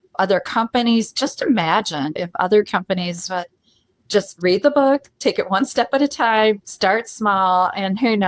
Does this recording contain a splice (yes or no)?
yes